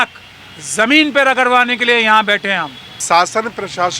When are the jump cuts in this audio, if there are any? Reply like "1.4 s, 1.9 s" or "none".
2.9 s